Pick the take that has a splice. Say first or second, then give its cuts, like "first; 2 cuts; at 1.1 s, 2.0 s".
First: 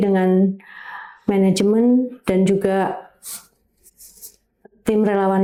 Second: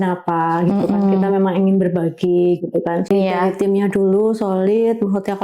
second; 1 cut; at 3.1 s